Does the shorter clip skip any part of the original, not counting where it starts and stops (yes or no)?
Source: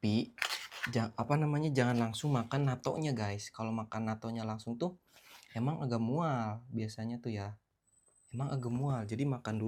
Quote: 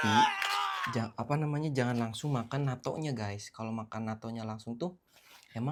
no